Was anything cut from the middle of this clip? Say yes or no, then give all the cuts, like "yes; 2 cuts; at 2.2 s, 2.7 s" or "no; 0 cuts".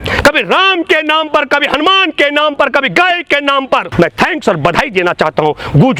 yes; 1 cut; at 3.9 s